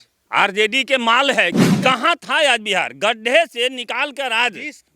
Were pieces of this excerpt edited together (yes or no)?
yes